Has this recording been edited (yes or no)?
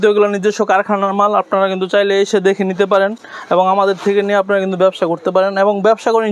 no